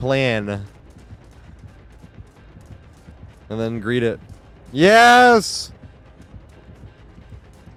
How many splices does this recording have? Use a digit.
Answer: 0